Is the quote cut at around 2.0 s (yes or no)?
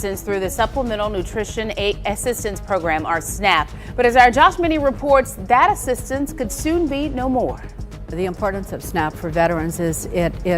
no